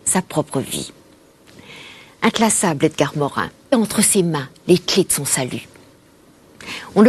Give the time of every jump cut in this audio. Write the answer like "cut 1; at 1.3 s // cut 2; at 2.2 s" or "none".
none